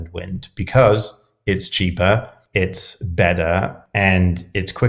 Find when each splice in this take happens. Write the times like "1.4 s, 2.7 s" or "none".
2.4 s, 3.8 s